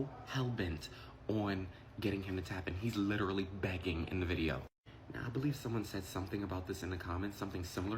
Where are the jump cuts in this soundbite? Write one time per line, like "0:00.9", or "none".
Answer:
none